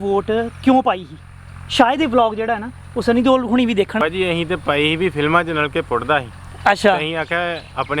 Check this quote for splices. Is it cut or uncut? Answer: cut